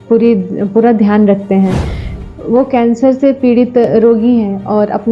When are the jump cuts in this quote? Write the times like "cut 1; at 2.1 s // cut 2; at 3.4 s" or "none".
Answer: cut 1; at 2.2 s